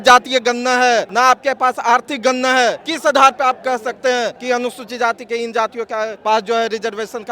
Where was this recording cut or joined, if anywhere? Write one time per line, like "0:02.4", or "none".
0:01.1
0:02.9
0:04.4
0:06.2